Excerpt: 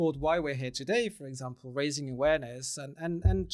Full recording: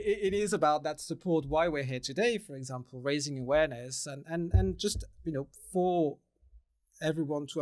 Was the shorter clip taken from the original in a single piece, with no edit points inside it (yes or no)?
yes